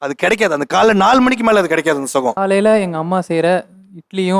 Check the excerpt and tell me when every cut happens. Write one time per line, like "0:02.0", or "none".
0:02.4